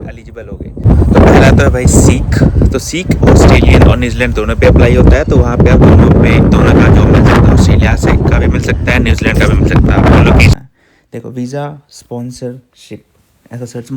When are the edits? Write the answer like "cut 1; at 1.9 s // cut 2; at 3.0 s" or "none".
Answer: cut 1; at 0.9 s // cut 2; at 10.5 s